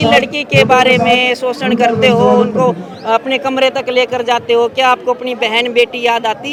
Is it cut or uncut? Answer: uncut